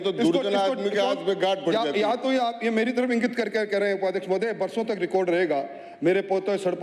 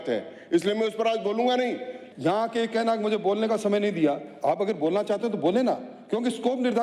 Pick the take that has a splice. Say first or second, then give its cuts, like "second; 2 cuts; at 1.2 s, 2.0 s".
second; 1 cut; at 2.0 s